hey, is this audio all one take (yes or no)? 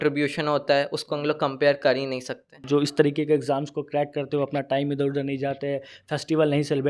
no